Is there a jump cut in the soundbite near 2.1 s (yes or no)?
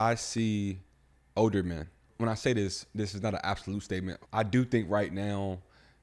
yes